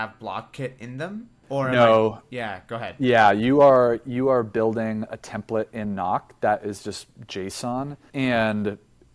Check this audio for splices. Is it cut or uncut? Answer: cut